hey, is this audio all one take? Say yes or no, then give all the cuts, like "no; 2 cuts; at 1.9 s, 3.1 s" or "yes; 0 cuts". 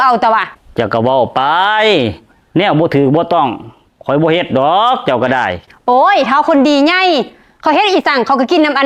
yes; 0 cuts